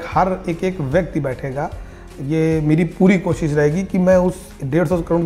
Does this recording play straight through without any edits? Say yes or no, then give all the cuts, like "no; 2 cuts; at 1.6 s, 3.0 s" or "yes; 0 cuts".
yes; 0 cuts